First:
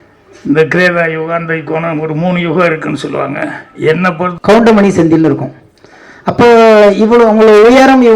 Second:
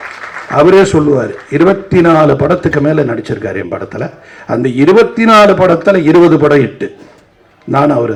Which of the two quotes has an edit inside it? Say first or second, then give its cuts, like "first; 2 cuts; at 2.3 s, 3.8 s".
first; 1 cut; at 4.3 s